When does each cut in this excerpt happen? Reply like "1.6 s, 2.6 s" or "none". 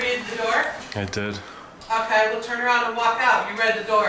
none